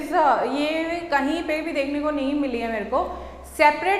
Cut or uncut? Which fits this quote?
uncut